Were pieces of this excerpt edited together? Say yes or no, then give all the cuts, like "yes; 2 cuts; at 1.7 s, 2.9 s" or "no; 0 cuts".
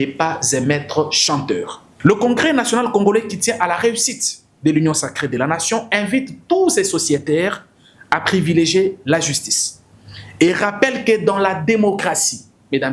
yes; 1 cut; at 1.8 s